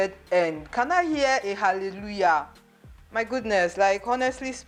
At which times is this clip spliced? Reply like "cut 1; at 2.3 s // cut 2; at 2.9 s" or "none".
none